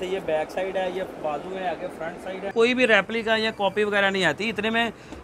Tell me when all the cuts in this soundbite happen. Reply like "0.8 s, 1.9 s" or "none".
2.5 s